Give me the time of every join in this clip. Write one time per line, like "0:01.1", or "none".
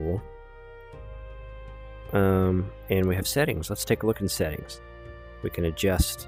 none